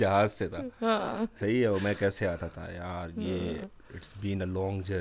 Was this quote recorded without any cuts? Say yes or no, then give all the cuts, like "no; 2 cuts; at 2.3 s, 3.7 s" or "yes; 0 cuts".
yes; 0 cuts